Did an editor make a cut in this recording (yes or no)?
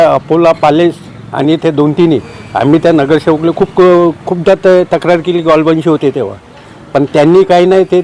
no